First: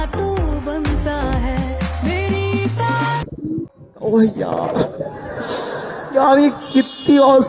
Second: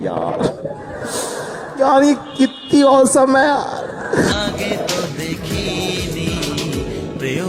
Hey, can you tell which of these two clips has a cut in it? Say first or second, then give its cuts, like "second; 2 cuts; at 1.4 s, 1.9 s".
first; 1 cut; at 3.2 s